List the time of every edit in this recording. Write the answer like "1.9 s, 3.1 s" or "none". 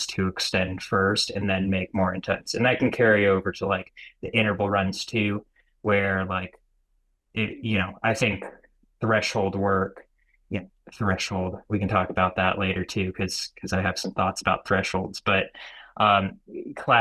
none